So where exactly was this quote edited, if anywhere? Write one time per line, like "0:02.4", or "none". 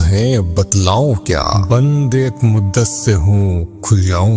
0:01.6